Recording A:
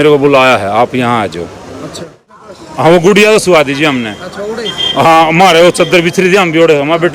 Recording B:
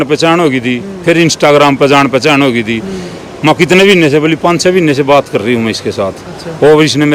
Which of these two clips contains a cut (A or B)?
A